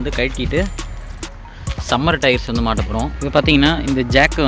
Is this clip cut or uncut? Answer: cut